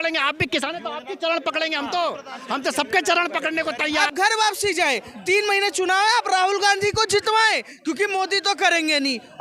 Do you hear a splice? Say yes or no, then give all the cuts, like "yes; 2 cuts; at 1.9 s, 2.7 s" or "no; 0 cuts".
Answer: yes; 1 cut; at 4.1 s